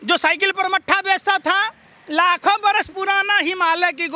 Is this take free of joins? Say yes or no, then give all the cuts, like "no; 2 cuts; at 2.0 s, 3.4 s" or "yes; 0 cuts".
yes; 0 cuts